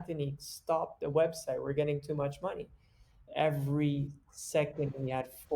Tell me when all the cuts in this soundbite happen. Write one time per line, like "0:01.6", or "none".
0:03.2